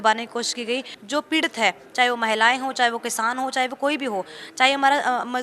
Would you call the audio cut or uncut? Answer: cut